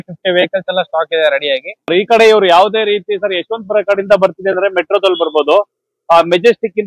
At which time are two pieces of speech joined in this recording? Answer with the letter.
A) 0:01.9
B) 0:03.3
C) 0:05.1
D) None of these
A